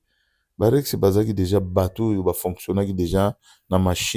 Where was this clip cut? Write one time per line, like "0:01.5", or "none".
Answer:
none